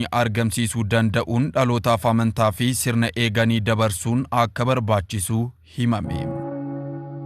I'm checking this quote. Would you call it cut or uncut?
cut